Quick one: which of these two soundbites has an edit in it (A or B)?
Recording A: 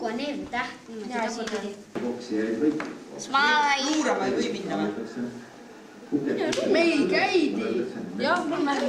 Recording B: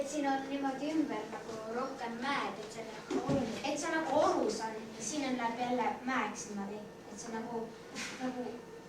A